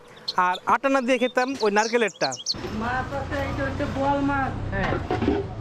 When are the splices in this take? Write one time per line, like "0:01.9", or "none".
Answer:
0:02.5